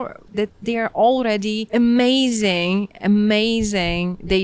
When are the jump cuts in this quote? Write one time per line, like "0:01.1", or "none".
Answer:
0:01.6